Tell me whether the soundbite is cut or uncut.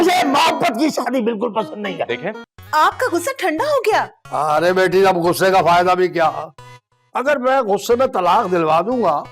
cut